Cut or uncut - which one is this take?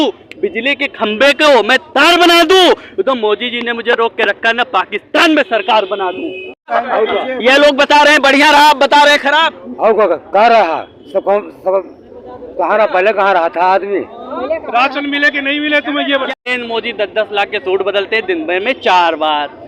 cut